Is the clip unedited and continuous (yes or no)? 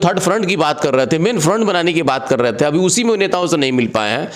yes